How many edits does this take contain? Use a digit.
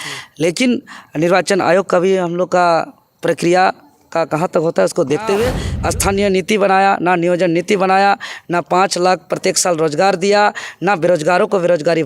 1